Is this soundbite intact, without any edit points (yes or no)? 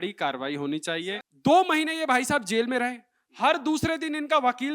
no